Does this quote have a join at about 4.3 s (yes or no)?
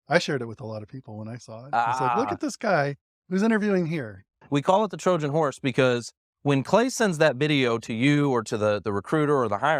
yes